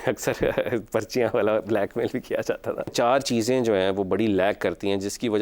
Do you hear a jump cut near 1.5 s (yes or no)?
no